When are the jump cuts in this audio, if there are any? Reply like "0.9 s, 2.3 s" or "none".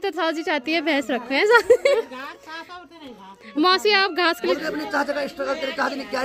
1.9 s, 4.5 s